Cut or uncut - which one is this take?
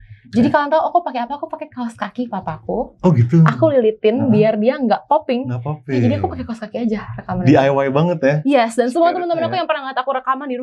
uncut